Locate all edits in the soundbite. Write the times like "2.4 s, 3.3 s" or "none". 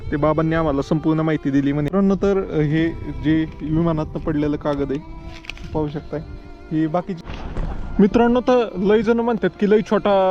1.9 s, 7.2 s